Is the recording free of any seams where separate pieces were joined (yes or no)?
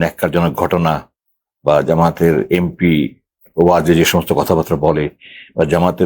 yes